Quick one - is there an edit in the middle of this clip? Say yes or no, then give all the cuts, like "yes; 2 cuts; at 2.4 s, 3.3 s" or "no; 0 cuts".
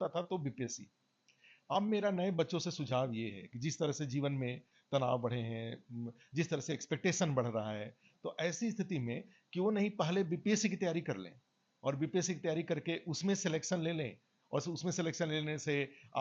no; 0 cuts